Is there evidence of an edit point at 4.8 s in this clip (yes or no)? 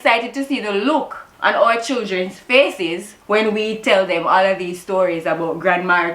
no